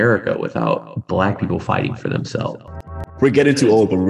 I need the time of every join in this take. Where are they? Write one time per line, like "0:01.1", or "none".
0:00.9
0:02.8